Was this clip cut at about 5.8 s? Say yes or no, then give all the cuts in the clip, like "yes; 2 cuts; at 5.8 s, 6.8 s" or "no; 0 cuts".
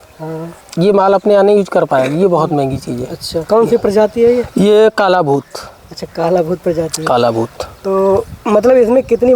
no; 0 cuts